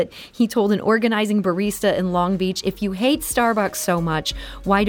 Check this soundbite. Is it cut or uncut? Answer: uncut